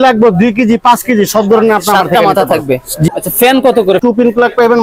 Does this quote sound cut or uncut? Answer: cut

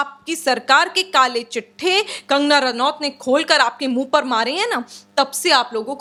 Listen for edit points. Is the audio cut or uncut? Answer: uncut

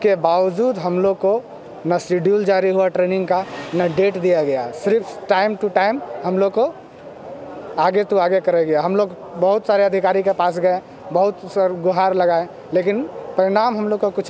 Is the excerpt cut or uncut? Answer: uncut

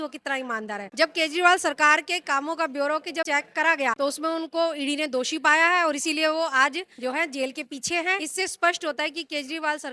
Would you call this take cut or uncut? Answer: cut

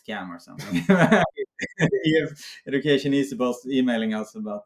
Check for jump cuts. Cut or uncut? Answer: cut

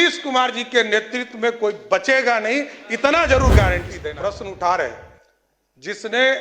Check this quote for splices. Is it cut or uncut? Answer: cut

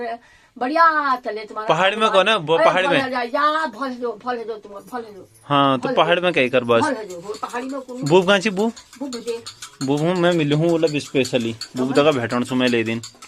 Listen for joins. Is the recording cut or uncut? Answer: uncut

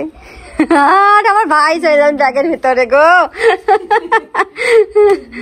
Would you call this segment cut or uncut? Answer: uncut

